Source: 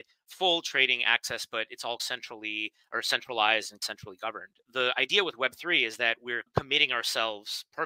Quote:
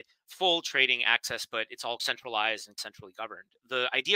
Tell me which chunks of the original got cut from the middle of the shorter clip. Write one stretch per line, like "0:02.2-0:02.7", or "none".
0:02.0-0:03.1